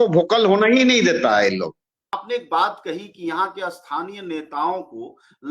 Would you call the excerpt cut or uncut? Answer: cut